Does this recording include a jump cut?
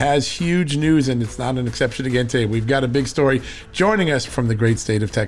yes; 1 cut; at 4.3 s

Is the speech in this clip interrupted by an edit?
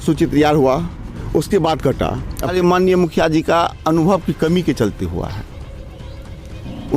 yes; 1 cut; at 2.5 s

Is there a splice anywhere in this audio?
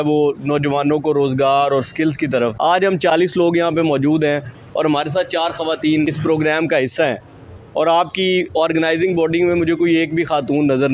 yes; 2 cuts; at 3.0 s, 6.1 s

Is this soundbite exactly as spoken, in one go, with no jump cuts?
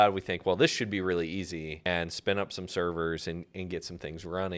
no; 1 cut; at 1.9 s

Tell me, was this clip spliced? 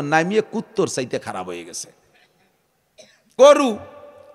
yes; 1 cut; at 3.4 s

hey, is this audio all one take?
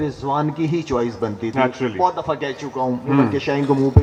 yes; 0 cuts

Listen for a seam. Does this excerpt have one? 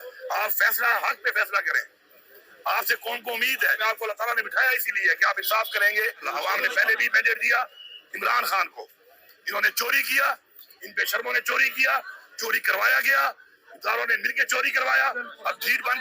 yes; 2 cuts; at 3.8 s, 6.2 s

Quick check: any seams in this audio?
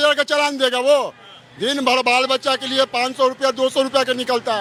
no; 0 cuts

